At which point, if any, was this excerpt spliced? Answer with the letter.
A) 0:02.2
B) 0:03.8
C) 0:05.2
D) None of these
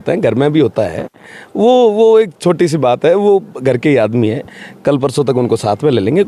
D